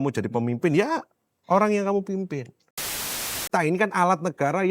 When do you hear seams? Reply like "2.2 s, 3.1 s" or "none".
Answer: 3.0 s

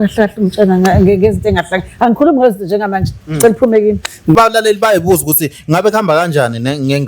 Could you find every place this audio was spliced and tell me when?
4.3 s

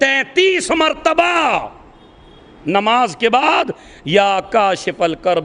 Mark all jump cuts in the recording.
none

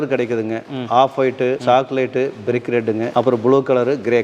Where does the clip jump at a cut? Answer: 1.6 s, 3.1 s

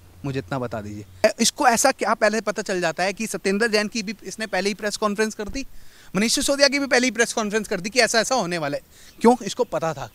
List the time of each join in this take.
1.2 s

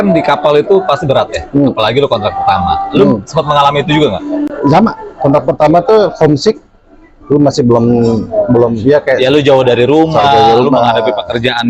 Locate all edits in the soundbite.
none

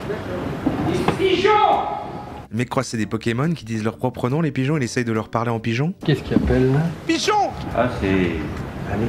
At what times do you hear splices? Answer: none

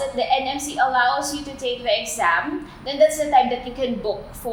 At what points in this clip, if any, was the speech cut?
none

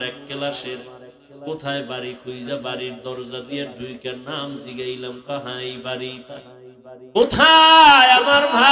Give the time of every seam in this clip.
7.5 s

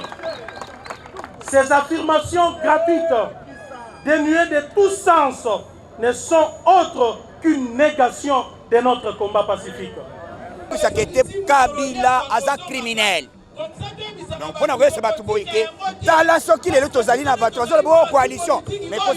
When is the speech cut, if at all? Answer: 10.8 s

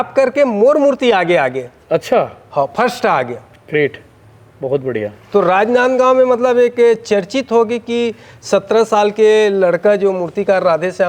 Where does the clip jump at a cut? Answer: none

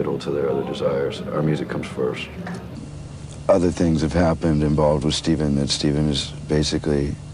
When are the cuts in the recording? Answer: 2.7 s

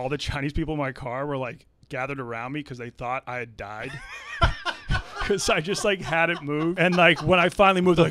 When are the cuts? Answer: 6.8 s

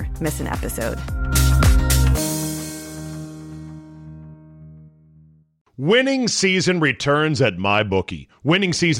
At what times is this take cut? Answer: 5.5 s

